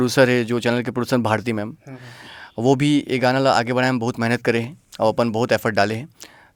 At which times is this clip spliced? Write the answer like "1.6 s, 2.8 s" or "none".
none